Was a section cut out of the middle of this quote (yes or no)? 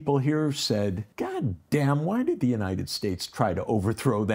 yes